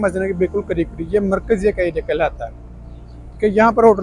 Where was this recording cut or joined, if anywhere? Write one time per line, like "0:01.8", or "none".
none